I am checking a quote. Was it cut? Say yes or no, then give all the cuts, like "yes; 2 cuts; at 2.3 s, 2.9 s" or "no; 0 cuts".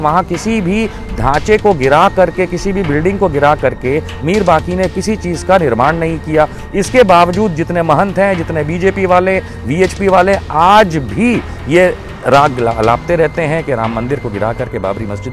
no; 0 cuts